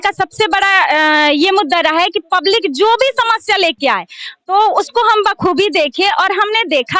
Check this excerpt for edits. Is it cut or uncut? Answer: uncut